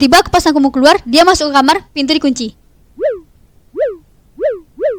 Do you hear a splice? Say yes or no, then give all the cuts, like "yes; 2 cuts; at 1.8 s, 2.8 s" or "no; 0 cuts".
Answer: no; 0 cuts